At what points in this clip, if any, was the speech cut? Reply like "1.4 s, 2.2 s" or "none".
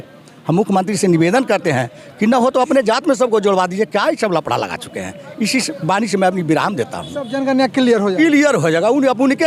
none